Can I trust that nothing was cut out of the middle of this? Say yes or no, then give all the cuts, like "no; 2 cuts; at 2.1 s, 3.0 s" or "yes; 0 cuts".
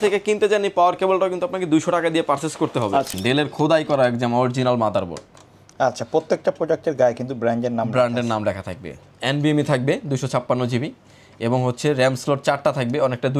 no; 1 cut; at 3.1 s